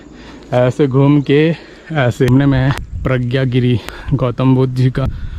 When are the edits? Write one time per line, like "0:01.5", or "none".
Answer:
0:02.3

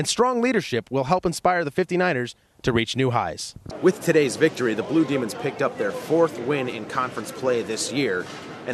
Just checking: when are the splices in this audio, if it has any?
0:03.7

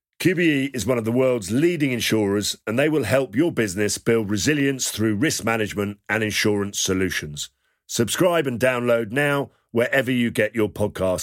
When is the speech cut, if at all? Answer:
none

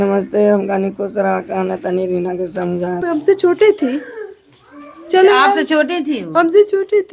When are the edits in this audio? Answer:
0:03.0

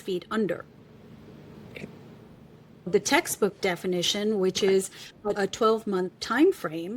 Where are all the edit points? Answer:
0:02.9
0:05.4

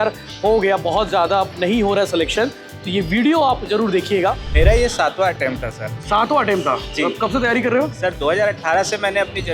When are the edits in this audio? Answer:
0:04.5

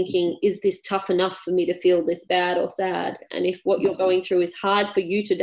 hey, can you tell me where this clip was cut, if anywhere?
0:03.2

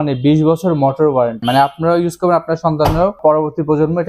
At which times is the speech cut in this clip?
0:01.4
0:03.2

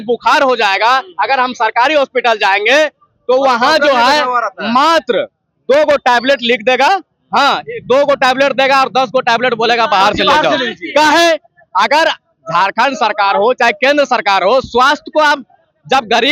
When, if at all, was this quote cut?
none

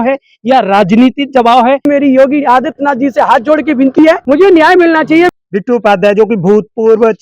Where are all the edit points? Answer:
0:01.8
0:04.2
0:05.3

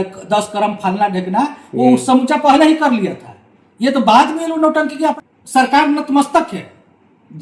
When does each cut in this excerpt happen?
0:05.2

